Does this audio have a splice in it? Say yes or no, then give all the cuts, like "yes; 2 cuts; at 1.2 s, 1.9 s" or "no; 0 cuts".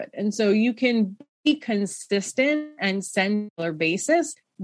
yes; 1 cut; at 3.5 s